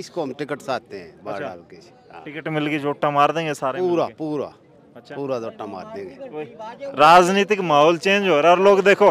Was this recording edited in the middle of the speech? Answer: no; 0 cuts

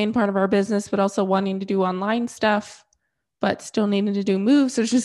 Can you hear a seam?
no; 0 cuts

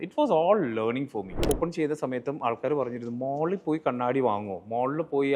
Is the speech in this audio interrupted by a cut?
yes; 1 cut; at 1.5 s

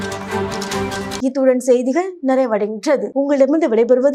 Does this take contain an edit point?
no; 0 cuts

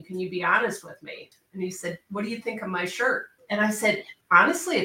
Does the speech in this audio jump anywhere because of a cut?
yes; 2 cuts; at 1.3 s, 3.3 s

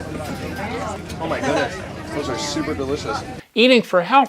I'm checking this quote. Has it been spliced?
yes; 2 cuts; at 1.0 s, 3.3 s

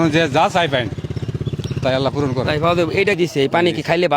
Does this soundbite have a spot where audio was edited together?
yes; 1 cut; at 3.2 s

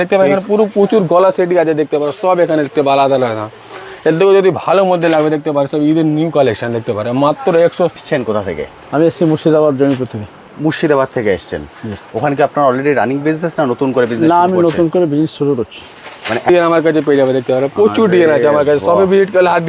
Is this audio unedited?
no; 2 cuts; at 8.0 s, 16.5 s

